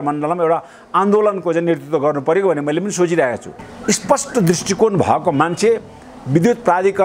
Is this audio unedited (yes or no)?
no